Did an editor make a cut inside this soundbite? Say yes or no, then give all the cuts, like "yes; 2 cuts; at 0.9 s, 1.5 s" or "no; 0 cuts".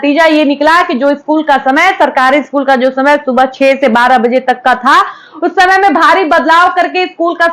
no; 0 cuts